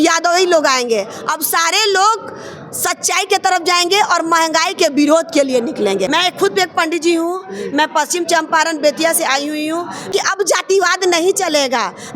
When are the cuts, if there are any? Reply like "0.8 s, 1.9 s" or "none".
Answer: 6.1 s, 10.1 s